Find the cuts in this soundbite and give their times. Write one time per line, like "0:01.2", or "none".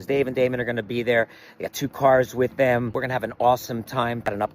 0:03.0